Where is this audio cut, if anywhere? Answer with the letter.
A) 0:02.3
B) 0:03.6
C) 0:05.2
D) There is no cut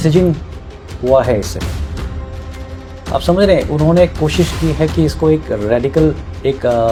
D